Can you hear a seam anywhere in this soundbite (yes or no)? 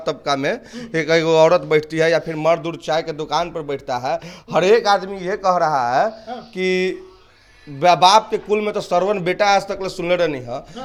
no